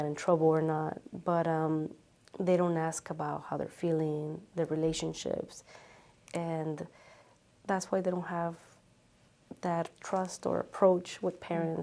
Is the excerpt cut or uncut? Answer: uncut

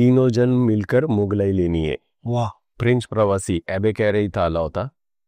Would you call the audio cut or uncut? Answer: cut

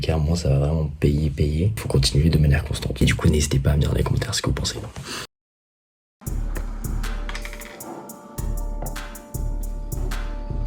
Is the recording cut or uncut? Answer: uncut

